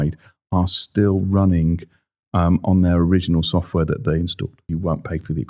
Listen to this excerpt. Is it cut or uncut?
cut